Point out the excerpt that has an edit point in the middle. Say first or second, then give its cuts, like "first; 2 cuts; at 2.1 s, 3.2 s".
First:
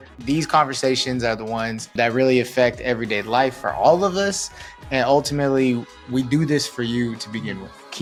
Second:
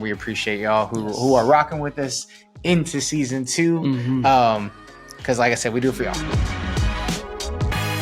second; 1 cut; at 6.2 s